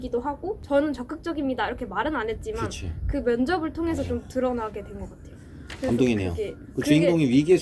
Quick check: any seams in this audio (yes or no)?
no